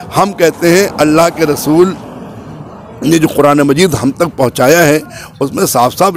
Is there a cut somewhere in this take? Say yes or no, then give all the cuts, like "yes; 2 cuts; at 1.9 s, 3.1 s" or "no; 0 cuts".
no; 0 cuts